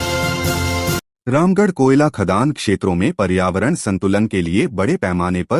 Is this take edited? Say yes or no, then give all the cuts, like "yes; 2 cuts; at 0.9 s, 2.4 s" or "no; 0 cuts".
no; 0 cuts